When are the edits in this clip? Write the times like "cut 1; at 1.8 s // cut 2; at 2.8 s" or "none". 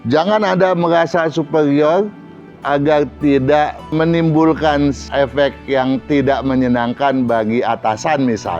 cut 1; at 3.9 s // cut 2; at 5.0 s